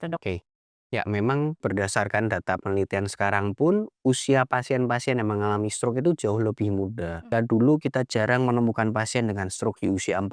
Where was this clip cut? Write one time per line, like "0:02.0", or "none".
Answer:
0:01.6
0:07.3